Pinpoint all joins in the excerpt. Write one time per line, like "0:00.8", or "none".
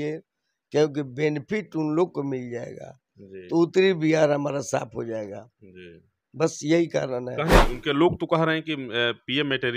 0:07.6